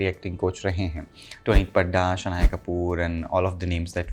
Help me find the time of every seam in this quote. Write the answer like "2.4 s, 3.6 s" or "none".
none